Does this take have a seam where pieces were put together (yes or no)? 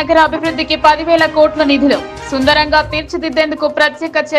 no